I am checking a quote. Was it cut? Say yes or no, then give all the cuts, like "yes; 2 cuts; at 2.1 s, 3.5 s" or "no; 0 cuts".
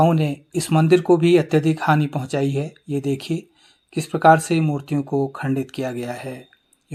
no; 0 cuts